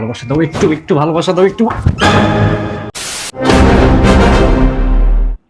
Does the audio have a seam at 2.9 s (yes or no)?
yes